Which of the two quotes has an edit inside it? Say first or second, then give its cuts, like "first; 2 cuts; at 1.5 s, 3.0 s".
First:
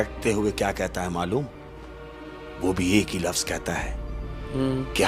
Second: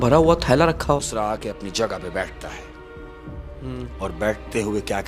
second; 1 cut; at 1.0 s